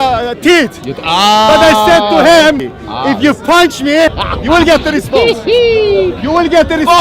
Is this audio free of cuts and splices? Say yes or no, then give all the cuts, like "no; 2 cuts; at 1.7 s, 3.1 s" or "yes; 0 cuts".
no; 2 cuts; at 2.6 s, 4.3 s